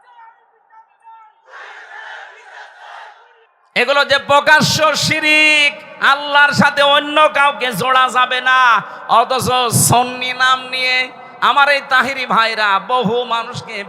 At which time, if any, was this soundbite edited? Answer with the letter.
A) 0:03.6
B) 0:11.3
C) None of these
A